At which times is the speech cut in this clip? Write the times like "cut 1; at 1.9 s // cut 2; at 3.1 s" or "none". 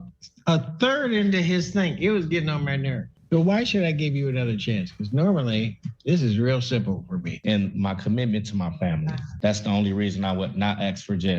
cut 1; at 3.0 s // cut 2; at 7.3 s